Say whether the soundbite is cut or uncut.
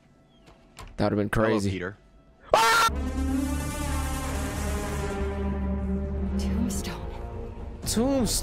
cut